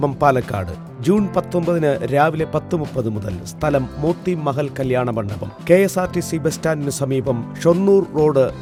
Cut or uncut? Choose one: uncut